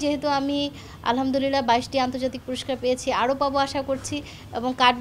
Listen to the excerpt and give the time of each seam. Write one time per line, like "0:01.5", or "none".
none